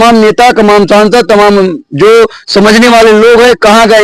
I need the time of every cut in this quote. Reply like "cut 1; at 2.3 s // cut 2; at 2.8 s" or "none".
none